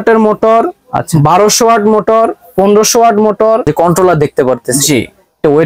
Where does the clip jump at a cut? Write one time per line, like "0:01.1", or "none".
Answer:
0:03.7